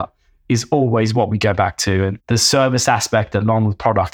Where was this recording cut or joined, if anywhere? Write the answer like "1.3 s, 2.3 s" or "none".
2.2 s